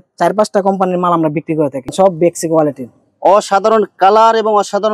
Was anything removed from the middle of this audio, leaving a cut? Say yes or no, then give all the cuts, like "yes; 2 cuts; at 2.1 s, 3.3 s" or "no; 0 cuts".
yes; 1 cut; at 1.8 s